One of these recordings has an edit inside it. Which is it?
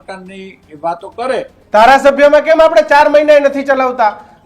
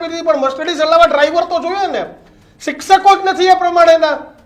first; 1 cut; at 1.6 s

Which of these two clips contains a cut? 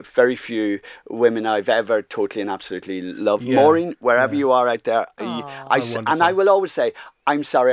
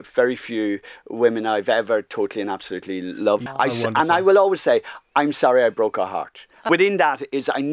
second; 2 cuts; at 3.4 s, 6.7 s

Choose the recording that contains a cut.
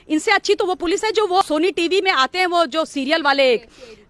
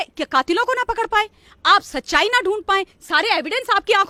first; 1 cut; at 1.4 s

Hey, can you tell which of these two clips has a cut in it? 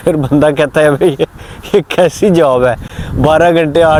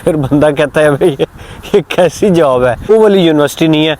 second; 1 cut; at 2.9 s

